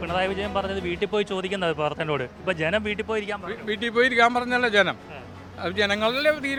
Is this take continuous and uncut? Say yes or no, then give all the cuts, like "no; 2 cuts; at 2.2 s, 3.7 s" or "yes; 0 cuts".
yes; 0 cuts